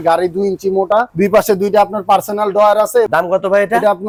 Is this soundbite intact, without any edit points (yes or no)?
yes